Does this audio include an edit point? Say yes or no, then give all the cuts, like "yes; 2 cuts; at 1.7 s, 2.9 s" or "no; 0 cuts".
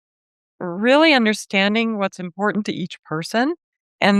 no; 0 cuts